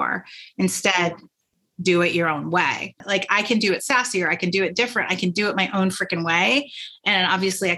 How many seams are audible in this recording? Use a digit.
1